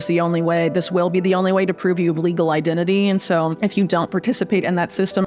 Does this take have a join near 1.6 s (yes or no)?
no